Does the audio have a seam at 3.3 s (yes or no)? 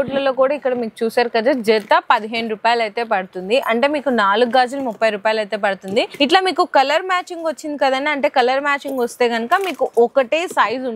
no